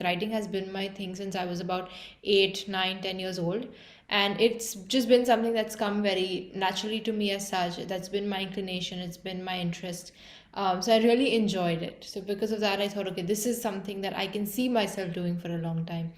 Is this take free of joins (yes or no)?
yes